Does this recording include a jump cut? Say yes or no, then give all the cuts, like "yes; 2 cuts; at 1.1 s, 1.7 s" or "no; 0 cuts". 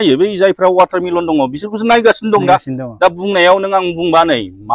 no; 0 cuts